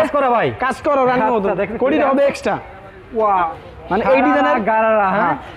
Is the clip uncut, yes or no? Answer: no